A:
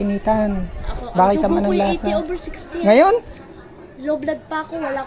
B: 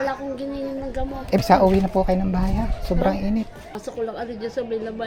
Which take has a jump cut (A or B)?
B